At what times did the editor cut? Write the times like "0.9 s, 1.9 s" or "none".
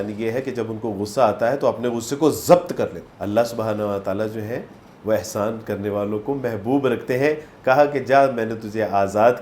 3.1 s

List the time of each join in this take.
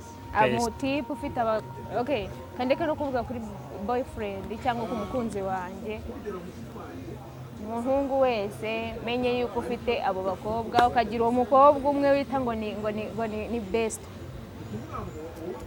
none

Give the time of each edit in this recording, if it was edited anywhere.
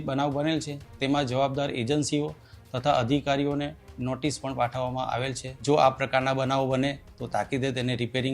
5.5 s

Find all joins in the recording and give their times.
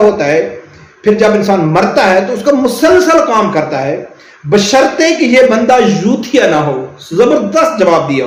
none

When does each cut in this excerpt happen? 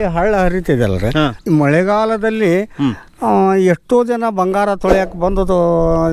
1.4 s

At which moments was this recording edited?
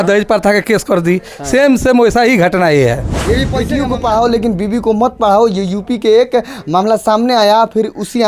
3.6 s

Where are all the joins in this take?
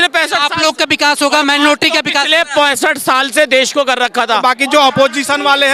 4.4 s

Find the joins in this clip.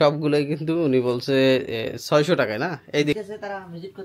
3.1 s

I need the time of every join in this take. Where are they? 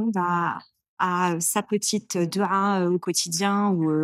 3.0 s

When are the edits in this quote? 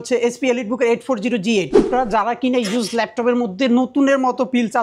1.9 s

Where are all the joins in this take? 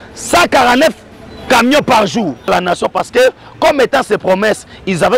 2.5 s

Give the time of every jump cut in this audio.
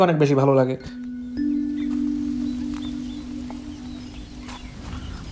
none

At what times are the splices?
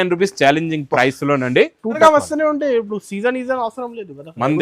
2.0 s

